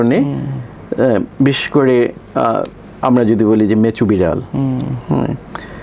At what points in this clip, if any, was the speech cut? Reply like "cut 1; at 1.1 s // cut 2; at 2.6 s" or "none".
none